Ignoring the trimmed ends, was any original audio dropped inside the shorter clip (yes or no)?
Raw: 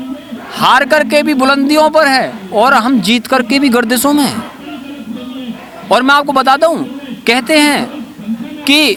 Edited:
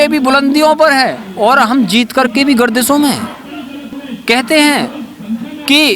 yes